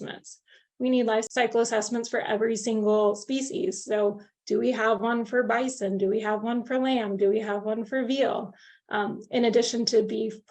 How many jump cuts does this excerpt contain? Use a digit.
1